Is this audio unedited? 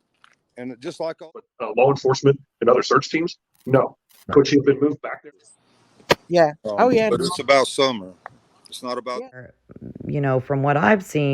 no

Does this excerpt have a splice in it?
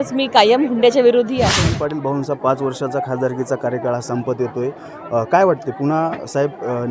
yes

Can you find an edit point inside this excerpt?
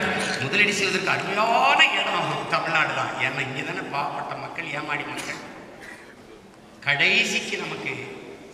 yes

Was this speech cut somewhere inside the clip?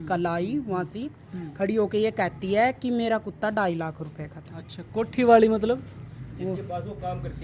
no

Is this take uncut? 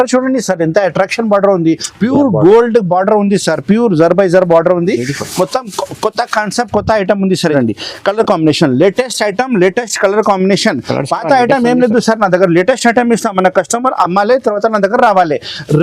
no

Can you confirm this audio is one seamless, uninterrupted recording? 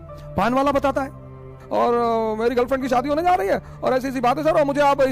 no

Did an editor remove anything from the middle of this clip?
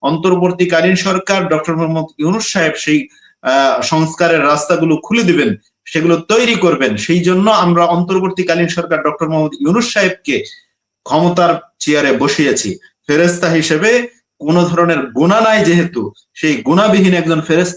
no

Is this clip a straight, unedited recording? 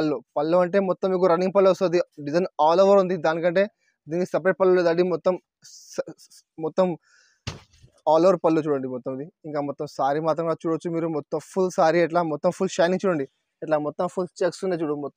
yes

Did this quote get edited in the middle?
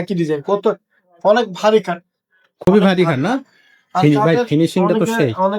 no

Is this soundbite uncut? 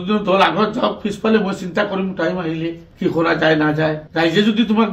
yes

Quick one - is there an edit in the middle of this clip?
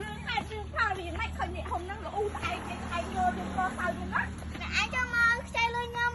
no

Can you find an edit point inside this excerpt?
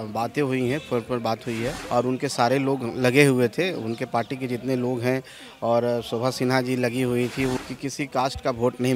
yes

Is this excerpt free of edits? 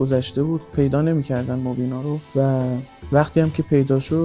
no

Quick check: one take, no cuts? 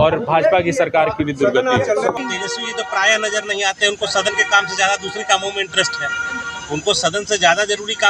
no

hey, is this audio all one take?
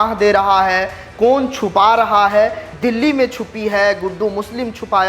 no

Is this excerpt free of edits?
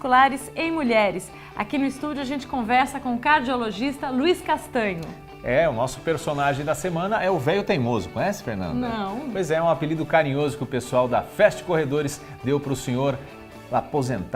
yes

